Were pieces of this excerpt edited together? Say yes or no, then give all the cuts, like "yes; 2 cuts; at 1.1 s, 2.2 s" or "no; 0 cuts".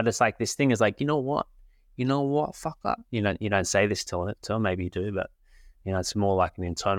no; 0 cuts